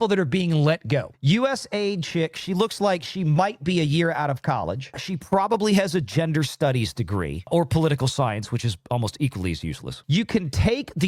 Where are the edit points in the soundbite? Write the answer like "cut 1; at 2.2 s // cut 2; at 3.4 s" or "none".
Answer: cut 1; at 1.1 s